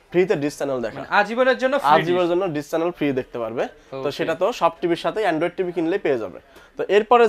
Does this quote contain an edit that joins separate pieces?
no; 0 cuts

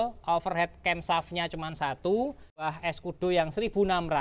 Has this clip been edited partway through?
yes; 1 cut; at 2.7 s

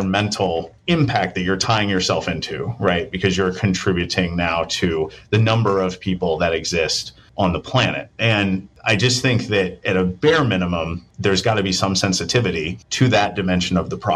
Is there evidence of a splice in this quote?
no; 0 cuts

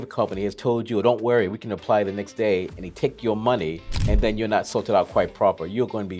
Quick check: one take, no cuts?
no; 1 cut; at 3.9 s

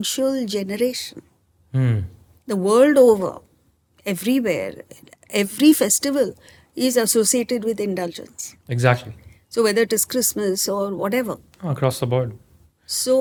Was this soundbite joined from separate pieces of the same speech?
no; 0 cuts

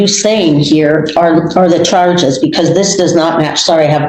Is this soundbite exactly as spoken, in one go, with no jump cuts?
yes; 0 cuts

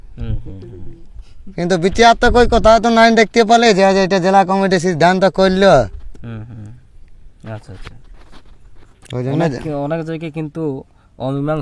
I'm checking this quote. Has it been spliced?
no; 0 cuts

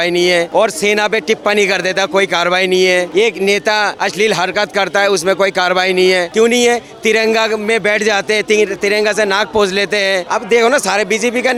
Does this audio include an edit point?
no; 0 cuts

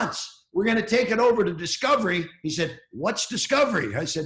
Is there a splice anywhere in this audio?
no; 0 cuts

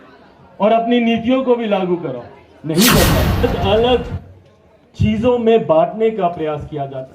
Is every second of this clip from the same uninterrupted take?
no; 1 cut; at 3.4 s

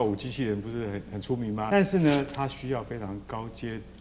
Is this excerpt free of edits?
no; 1 cut; at 1.7 s

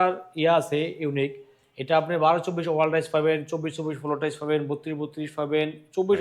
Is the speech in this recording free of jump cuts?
yes; 0 cuts

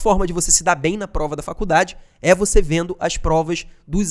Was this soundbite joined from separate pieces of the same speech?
no; 0 cuts

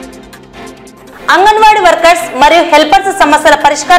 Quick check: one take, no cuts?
yes; 0 cuts

